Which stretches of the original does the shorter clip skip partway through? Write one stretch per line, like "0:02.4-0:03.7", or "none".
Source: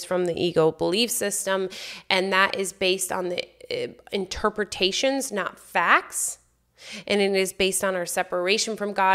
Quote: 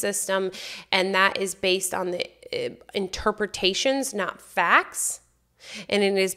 none